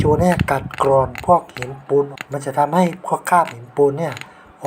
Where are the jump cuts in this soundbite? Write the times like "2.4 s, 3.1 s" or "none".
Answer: 2.2 s